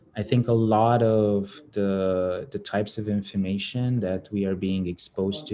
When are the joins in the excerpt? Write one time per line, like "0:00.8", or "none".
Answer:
none